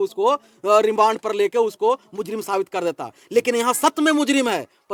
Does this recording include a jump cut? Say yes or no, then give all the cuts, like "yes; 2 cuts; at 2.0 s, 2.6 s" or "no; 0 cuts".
no; 0 cuts